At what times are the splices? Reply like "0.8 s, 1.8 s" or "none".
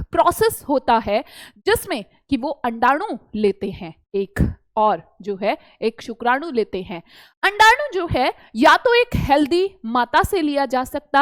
none